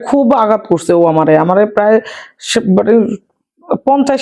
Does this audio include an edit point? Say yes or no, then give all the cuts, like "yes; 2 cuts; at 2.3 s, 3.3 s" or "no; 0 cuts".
no; 0 cuts